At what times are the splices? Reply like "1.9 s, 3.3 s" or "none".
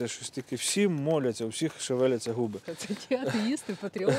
2.7 s